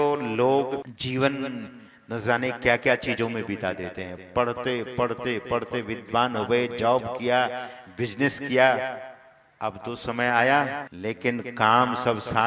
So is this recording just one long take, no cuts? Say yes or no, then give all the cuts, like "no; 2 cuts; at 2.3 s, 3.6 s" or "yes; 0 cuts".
no; 2 cuts; at 0.9 s, 10.9 s